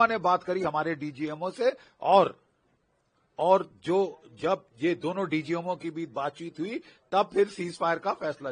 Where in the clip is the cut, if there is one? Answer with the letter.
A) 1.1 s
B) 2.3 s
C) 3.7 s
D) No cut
D